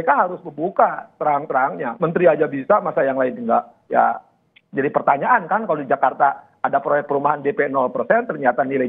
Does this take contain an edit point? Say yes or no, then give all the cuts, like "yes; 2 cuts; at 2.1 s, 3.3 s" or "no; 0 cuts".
yes; 1 cut; at 3.8 s